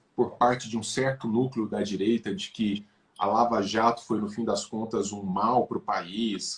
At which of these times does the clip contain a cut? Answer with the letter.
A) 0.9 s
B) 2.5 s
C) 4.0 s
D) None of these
D